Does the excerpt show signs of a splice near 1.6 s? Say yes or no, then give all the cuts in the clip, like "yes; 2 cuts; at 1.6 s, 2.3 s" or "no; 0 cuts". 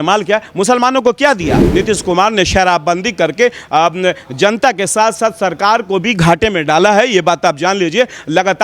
yes; 1 cut; at 1.6 s